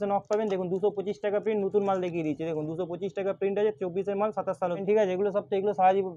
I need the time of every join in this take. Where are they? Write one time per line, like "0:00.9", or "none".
0:04.8